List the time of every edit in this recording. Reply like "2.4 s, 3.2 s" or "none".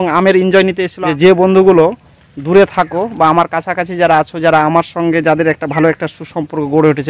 0.9 s